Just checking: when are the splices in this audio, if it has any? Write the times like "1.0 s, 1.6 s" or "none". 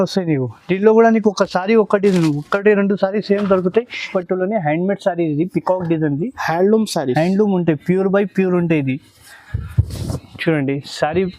4.0 s